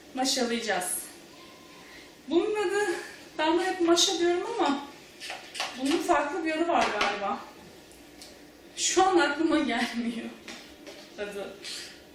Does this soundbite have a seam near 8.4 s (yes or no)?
yes